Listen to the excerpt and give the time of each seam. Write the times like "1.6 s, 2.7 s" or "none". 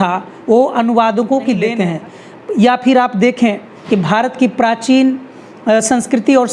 1.7 s